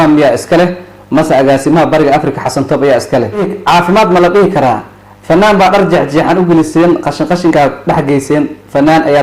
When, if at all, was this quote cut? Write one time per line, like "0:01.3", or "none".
0:03.5